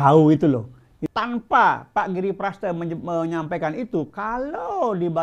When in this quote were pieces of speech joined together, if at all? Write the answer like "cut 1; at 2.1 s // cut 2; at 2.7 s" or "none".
cut 1; at 1.0 s